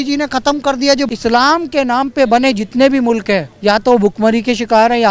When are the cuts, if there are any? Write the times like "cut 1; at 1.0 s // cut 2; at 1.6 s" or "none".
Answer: cut 1; at 1.1 s // cut 2; at 3.5 s